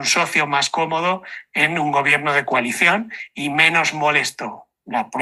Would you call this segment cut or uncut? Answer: uncut